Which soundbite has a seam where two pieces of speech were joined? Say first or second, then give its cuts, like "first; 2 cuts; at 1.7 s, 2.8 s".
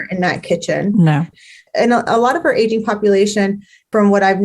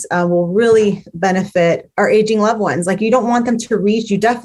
first; 1 cut; at 1.4 s